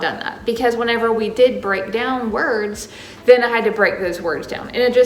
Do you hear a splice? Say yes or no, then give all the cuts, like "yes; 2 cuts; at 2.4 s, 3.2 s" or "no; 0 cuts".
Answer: no; 0 cuts